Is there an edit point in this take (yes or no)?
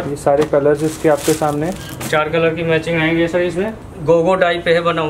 yes